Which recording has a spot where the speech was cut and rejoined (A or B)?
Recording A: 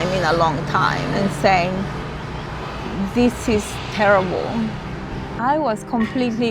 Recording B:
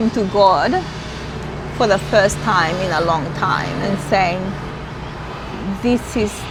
A